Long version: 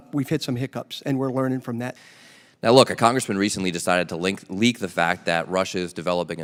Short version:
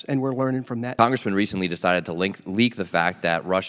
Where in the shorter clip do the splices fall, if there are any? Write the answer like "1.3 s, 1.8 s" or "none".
0.9 s